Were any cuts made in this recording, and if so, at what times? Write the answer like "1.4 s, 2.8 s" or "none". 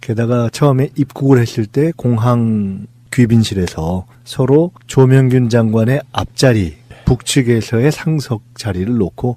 5.3 s